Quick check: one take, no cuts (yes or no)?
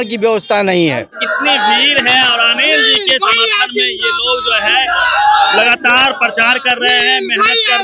no